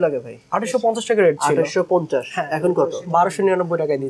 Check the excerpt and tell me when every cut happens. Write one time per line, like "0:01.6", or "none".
none